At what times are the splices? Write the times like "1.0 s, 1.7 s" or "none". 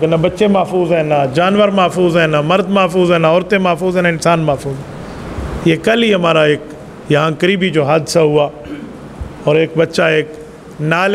none

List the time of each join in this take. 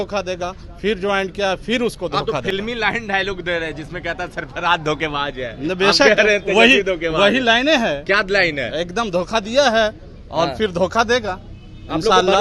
none

